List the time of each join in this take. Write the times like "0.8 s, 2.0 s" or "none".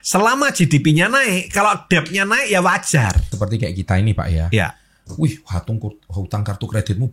3.3 s